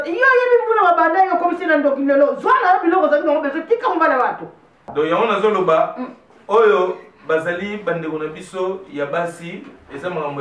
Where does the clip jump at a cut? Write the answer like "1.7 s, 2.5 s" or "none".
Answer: 4.9 s